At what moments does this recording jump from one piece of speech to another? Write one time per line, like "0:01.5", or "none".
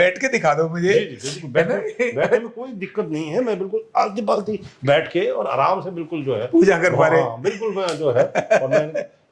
none